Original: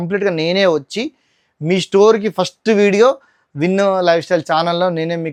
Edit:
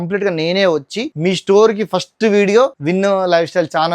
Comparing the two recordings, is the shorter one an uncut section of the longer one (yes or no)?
no